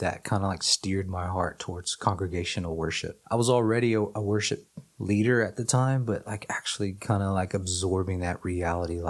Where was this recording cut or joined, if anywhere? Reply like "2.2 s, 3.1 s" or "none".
3.1 s

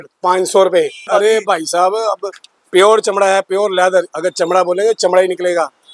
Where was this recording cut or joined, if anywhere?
1.0 s

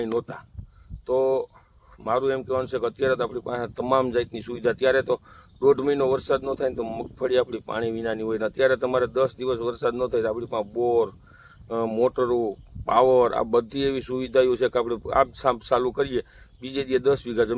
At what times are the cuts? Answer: none

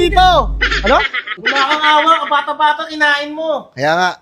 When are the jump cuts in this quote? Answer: 1.3 s

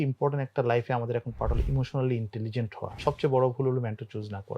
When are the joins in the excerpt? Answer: 3.0 s

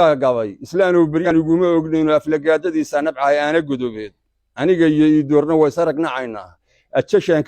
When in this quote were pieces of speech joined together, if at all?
1.3 s

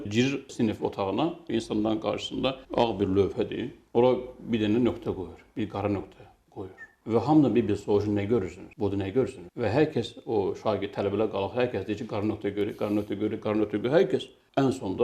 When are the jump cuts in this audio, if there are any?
1.4 s, 2.6 s

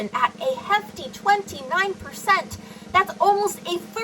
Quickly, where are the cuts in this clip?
none

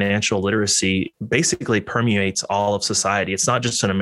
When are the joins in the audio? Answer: 1.1 s

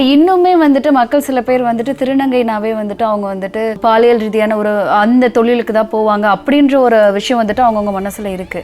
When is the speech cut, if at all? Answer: 3.8 s

